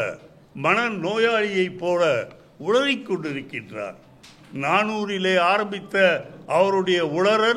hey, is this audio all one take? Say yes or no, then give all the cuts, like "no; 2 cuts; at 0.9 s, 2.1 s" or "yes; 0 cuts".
yes; 0 cuts